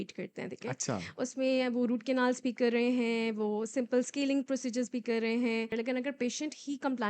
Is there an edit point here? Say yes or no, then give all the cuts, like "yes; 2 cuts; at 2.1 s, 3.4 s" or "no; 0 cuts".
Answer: yes; 1 cut; at 5.7 s